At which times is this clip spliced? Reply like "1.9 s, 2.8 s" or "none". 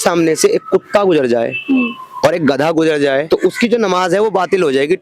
3.2 s